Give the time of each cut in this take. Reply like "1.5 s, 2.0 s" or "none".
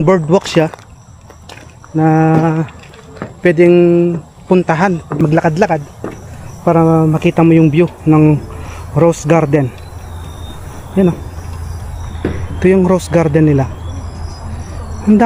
5.2 s